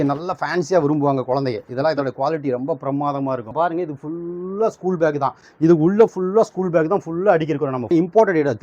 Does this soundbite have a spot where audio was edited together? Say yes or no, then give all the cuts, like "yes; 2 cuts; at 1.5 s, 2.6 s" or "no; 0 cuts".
yes; 2 cuts; at 3.5 s, 7.9 s